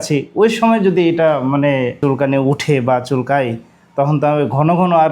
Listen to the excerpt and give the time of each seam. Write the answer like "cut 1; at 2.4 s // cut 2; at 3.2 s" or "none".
cut 1; at 2.0 s